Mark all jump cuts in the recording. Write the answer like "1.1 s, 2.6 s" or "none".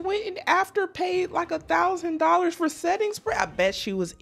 none